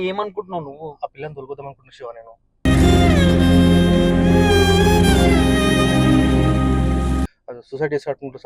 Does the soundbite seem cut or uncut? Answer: cut